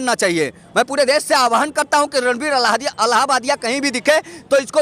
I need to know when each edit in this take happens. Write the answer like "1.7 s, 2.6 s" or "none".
none